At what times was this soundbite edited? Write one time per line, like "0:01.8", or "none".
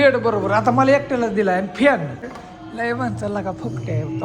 0:02.3